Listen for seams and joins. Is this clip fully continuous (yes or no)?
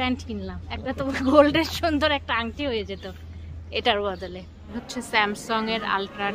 no